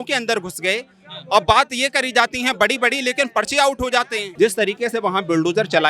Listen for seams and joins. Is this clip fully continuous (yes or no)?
no